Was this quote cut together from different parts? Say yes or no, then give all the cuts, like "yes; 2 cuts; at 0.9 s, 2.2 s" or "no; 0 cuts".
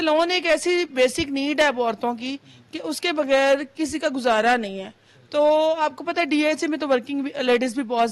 no; 0 cuts